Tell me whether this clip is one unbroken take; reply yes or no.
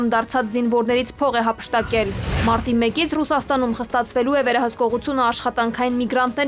yes